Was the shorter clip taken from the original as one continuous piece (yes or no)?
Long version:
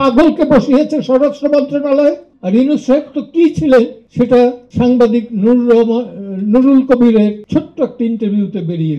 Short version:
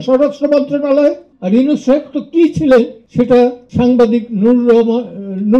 yes